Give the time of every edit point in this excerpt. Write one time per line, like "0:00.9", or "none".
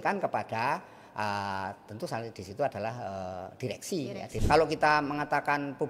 0:04.3